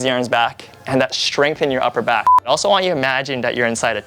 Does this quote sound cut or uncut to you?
cut